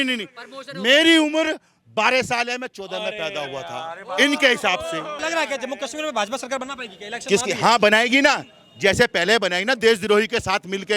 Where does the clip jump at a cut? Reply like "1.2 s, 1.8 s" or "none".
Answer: 5.2 s

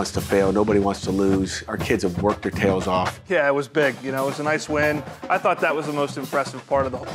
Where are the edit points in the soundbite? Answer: 3.2 s, 5.1 s

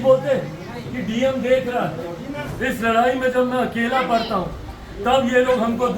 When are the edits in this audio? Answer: 2.5 s

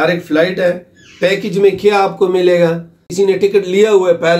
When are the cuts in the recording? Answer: 3.0 s

